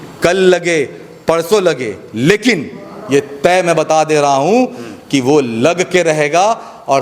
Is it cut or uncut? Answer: uncut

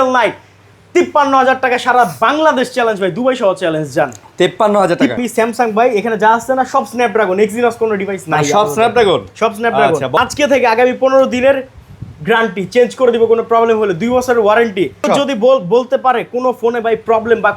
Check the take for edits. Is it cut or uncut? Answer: cut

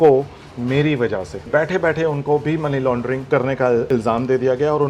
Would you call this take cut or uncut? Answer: cut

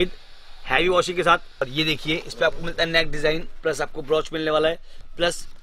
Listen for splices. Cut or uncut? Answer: cut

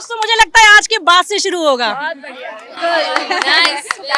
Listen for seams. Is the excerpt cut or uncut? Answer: uncut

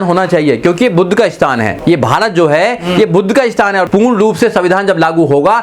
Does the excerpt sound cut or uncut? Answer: cut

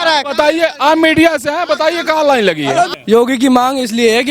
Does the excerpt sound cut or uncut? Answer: cut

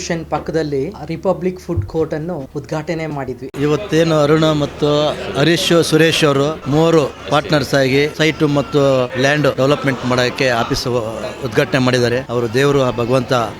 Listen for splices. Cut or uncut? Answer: cut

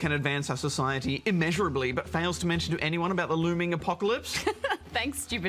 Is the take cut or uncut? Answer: uncut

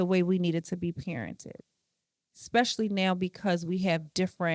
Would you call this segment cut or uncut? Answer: uncut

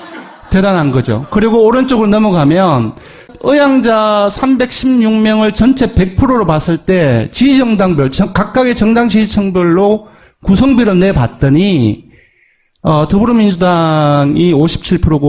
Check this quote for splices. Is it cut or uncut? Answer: cut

